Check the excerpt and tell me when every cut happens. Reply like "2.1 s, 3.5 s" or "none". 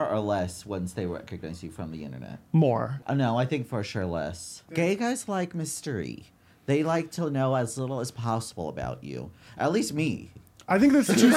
3.0 s, 4.8 s

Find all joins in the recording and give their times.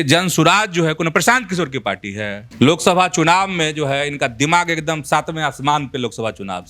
2.4 s

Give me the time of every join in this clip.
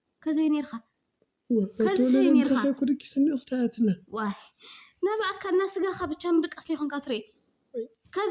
none

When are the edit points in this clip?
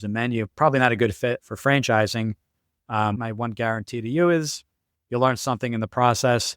3.2 s

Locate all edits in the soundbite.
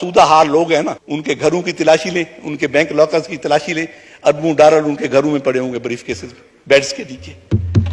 1.0 s

